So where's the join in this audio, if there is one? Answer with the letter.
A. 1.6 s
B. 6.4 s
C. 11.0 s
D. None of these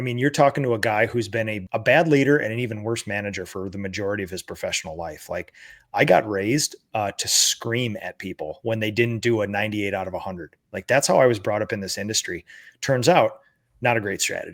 A